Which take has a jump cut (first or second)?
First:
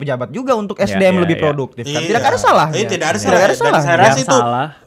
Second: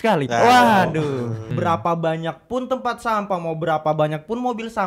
second